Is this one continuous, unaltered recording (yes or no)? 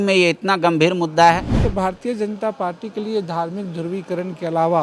no